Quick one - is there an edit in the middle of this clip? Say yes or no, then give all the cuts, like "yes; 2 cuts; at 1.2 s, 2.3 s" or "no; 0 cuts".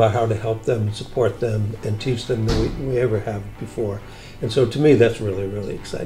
no; 0 cuts